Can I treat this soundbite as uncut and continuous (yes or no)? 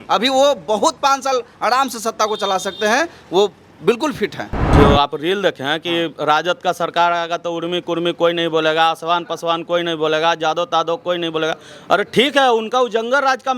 no